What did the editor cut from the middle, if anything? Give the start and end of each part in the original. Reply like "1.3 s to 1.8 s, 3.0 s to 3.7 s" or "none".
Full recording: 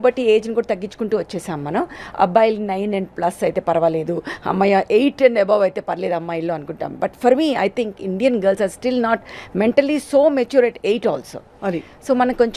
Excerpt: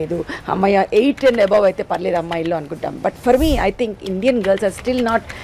none